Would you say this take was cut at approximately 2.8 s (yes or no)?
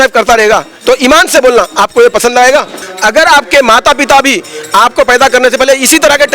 yes